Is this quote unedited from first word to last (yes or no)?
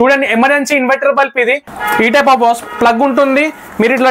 no